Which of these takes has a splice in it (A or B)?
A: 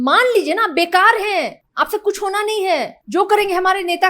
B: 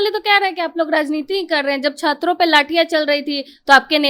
A